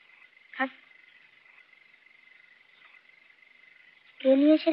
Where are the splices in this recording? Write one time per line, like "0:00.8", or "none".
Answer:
none